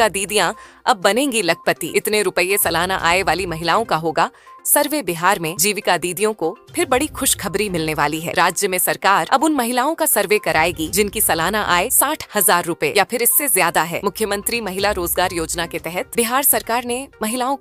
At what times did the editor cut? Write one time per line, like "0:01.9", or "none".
none